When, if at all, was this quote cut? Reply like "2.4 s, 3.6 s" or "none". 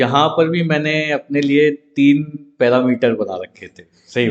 none